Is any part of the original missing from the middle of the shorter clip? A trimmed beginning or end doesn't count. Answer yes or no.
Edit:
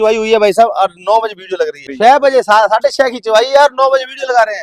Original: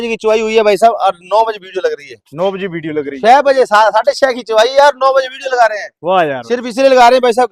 yes